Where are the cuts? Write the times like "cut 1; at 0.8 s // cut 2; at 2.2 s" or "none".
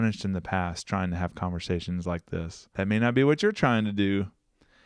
cut 1; at 2.6 s